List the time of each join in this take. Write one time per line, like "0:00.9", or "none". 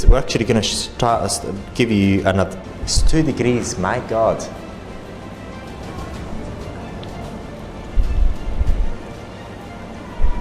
0:02.6